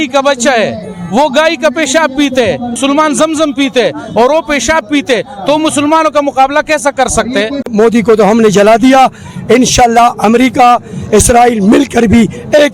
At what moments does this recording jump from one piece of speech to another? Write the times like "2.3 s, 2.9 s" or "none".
2.8 s, 7.7 s

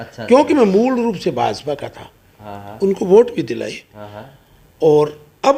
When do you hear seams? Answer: none

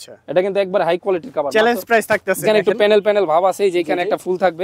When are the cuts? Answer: 2.4 s

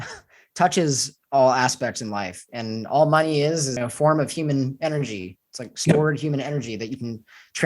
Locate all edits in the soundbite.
3.7 s

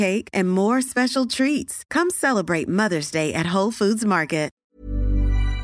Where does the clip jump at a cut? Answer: 4.5 s

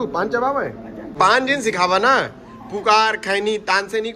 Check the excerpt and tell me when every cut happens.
1.0 s

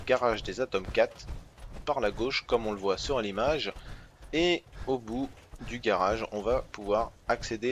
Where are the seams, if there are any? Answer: 2.2 s

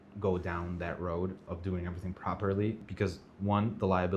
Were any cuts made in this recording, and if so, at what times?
2.8 s

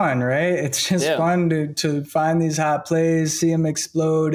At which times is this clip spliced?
none

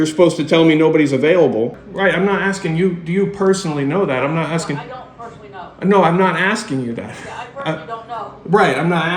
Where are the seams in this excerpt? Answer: 1.8 s

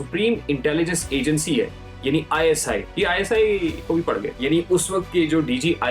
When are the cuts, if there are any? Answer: 2.9 s, 3.9 s

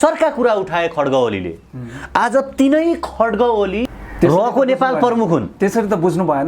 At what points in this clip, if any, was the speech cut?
4.0 s

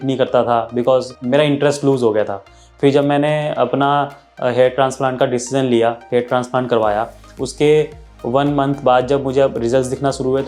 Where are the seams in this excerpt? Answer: 1.2 s

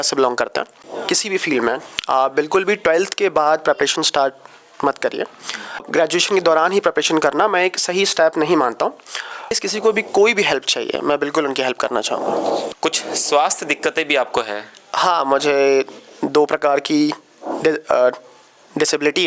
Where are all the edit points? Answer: 0.9 s, 5.9 s, 9.6 s, 12.7 s

